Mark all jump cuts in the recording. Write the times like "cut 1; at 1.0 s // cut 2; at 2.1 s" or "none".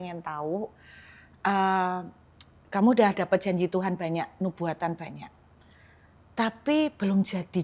none

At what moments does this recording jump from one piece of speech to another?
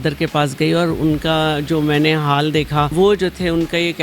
cut 1; at 2.9 s

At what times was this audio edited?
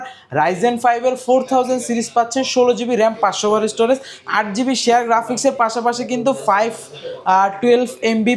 none

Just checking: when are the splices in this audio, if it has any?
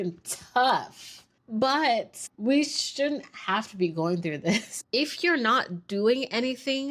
cut 1; at 4.7 s

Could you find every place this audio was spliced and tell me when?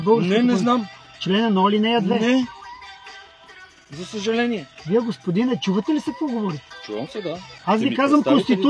cut 1; at 0.9 s // cut 2; at 2.5 s // cut 3; at 4.7 s // cut 4; at 7.5 s

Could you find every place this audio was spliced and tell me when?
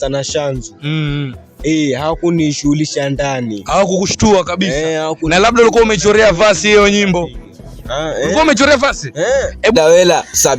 cut 1; at 7.6 s // cut 2; at 9.7 s

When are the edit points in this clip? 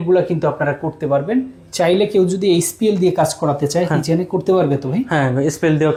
none

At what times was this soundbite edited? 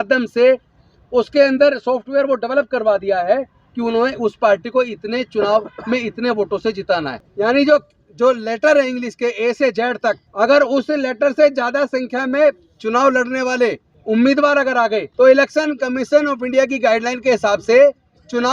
cut 1; at 7.2 s // cut 2; at 10.3 s // cut 3; at 13.9 s // cut 4; at 15.1 s

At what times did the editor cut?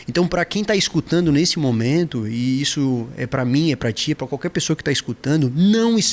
none

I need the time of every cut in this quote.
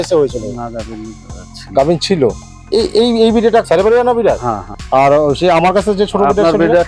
cut 1; at 2.5 s // cut 2; at 3.6 s // cut 3; at 4.7 s

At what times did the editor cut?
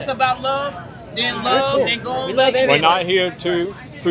none

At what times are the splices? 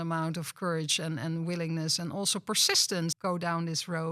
cut 1; at 3.2 s

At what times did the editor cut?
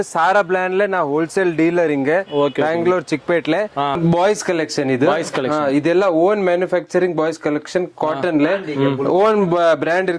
cut 1; at 4.0 s

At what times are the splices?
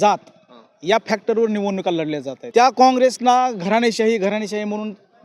cut 1; at 2.4 s

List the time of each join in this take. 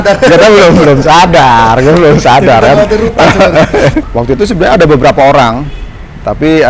cut 1; at 4.1 s

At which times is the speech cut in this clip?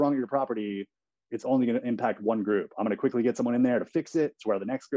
none

